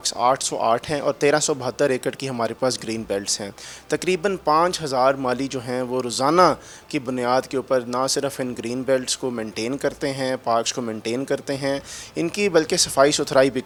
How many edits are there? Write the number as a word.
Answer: zero